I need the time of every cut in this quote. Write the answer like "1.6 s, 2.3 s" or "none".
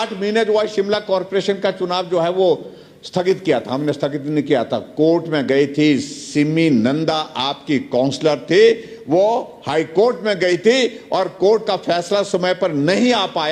none